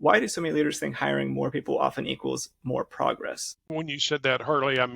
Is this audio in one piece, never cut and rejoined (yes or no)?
no